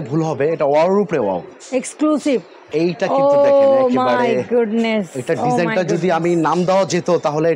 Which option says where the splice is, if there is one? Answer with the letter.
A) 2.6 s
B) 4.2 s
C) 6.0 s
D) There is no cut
A